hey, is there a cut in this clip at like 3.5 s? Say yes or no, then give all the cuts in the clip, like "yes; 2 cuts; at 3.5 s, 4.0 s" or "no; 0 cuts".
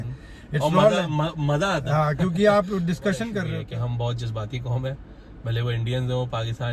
yes; 1 cut; at 3.5 s